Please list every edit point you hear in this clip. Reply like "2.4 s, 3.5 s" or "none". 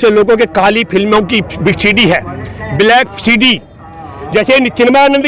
none